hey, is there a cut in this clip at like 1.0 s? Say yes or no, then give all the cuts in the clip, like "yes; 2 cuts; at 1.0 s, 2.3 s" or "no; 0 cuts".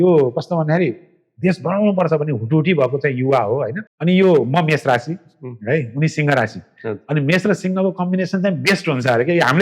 no; 1 cut; at 3.8 s